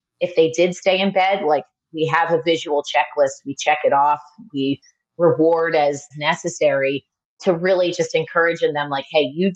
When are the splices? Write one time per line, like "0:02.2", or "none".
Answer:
0:06.1